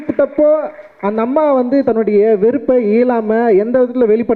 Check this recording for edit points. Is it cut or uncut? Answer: uncut